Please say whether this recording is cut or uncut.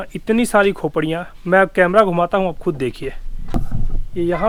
uncut